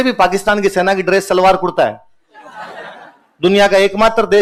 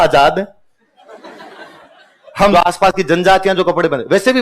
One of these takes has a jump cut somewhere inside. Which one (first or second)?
second